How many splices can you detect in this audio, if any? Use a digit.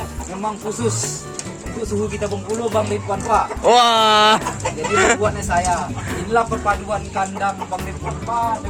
0